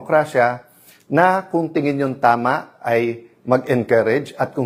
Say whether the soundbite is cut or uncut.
uncut